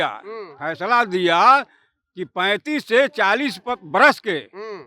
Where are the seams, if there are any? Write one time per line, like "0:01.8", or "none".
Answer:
none